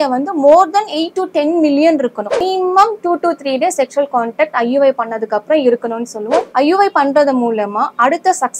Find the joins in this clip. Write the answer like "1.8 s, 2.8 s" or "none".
2.4 s, 6.5 s

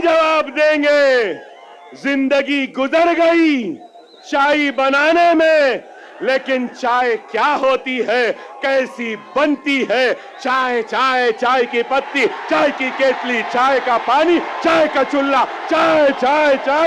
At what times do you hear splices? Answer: none

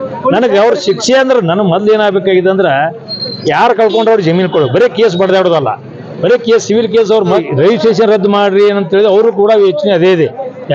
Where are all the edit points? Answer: 7.4 s

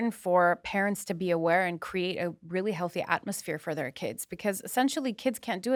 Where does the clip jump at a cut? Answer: none

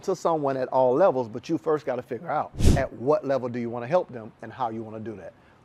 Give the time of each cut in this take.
2.6 s

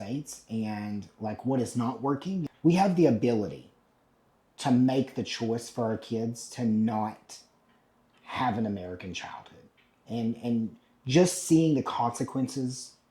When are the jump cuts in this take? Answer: 2.4 s

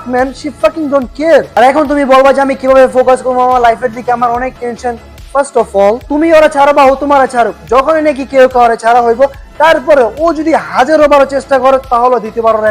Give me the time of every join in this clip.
1.5 s, 6.0 s

